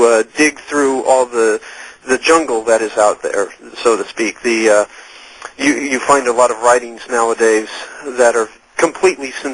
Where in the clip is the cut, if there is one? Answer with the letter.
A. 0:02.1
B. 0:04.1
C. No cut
B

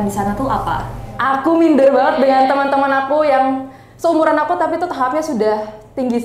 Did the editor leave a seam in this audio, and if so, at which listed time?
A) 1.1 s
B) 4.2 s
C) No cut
A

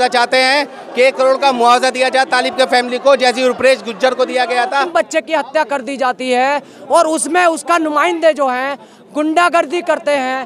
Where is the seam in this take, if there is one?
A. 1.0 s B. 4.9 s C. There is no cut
B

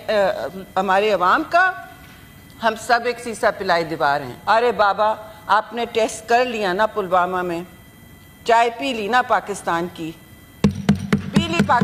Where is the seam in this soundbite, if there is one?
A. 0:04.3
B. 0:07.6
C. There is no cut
A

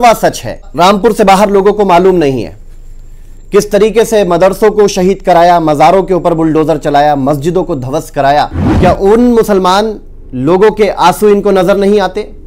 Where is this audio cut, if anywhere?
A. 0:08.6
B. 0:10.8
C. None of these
A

